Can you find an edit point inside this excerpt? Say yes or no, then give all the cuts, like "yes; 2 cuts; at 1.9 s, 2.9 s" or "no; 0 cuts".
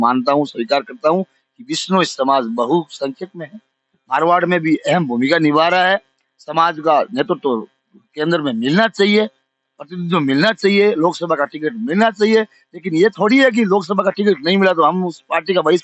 no; 0 cuts